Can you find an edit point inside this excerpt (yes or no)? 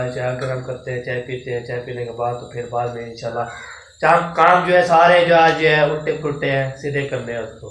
no